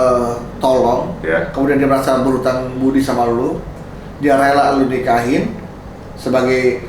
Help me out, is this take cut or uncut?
uncut